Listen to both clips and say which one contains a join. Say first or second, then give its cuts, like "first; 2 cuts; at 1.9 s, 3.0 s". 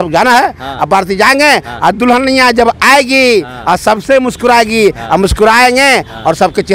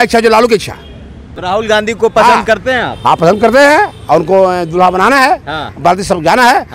second; 1 cut; at 1.6 s